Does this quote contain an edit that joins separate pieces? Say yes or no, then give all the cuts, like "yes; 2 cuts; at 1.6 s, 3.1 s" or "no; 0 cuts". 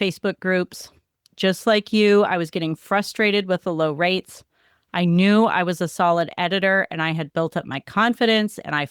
no; 0 cuts